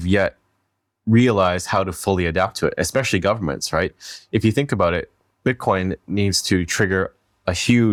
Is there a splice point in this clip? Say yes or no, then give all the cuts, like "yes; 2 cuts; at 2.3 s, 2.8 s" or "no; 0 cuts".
no; 0 cuts